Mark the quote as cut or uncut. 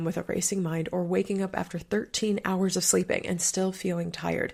uncut